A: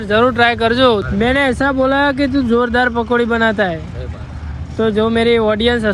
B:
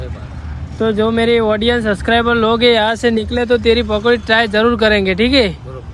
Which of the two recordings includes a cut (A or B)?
A